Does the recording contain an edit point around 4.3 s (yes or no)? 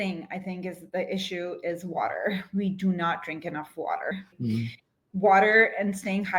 yes